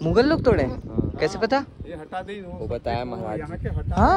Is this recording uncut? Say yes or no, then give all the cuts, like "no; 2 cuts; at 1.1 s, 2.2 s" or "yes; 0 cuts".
yes; 0 cuts